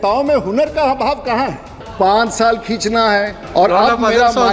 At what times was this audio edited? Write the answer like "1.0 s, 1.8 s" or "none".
1.8 s, 3.4 s